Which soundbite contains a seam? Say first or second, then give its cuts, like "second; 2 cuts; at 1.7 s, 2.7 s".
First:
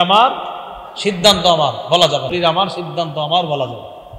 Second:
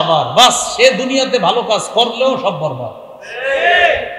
first; 1 cut; at 2.3 s